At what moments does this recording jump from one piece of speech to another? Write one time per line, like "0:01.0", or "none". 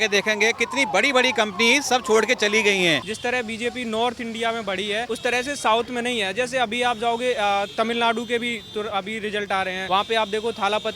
0:03.1
0:05.1
0:09.8